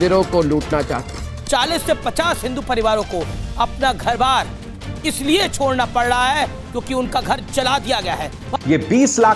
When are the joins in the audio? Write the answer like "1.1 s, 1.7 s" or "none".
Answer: 1.3 s, 8.4 s

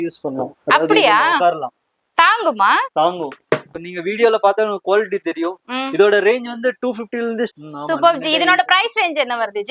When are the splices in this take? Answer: 3.7 s, 7.5 s

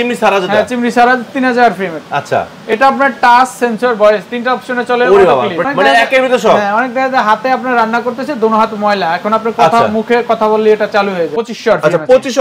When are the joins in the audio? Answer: 5.6 s, 11.3 s

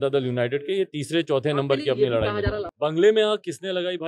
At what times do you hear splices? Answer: 2.7 s

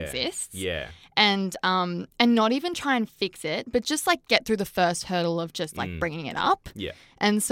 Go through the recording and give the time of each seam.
none

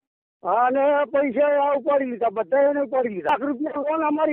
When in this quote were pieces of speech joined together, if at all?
3.3 s

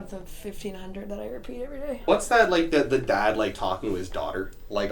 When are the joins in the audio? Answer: 2.0 s

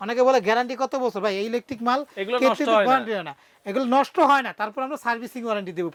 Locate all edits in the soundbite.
none

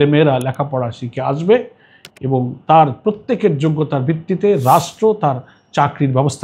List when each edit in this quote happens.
none

